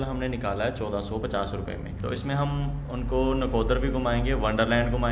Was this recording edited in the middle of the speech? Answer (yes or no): yes